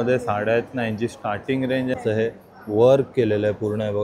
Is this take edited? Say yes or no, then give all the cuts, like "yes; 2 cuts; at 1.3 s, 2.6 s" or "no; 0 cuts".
yes; 1 cut; at 2.0 s